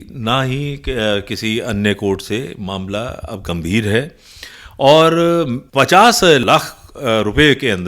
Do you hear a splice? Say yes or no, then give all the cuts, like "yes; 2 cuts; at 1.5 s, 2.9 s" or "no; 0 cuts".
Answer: yes; 2 cuts; at 5.6 s, 6.4 s